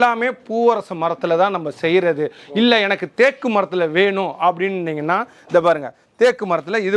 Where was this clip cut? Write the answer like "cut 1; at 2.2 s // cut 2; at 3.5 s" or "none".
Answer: none